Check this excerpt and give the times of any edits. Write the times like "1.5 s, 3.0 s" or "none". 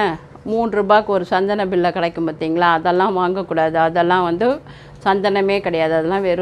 none